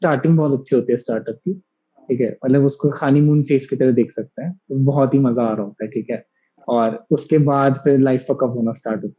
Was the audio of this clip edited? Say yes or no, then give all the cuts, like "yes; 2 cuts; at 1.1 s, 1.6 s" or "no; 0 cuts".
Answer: no; 0 cuts